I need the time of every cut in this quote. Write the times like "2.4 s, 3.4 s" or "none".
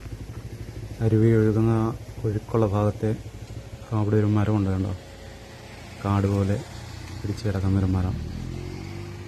1.0 s